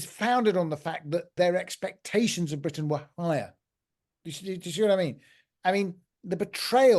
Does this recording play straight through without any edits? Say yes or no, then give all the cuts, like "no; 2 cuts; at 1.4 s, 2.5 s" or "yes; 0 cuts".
no; 1 cut; at 1.3 s